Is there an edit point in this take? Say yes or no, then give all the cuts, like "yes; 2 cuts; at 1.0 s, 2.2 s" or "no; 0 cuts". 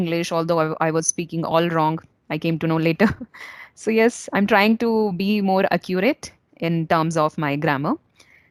no; 0 cuts